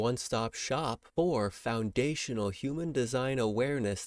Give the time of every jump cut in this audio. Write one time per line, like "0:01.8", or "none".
0:01.0